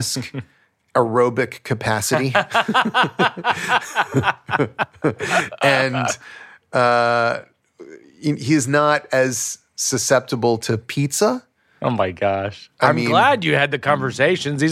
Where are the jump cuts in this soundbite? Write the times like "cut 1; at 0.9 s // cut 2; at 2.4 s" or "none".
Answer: none